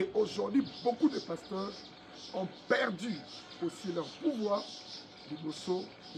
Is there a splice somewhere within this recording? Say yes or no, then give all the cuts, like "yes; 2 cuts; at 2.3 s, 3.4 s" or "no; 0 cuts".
no; 0 cuts